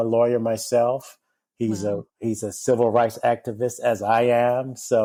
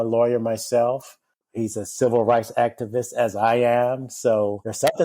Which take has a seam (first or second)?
second